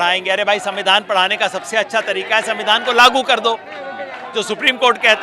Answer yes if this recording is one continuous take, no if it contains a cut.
yes